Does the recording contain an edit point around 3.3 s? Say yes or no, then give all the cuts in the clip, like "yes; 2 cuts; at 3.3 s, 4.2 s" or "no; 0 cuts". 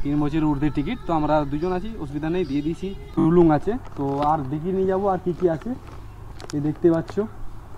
yes; 1 cut; at 3.3 s